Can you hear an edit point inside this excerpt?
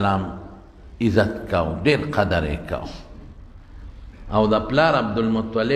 no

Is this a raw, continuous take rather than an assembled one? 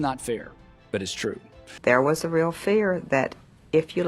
no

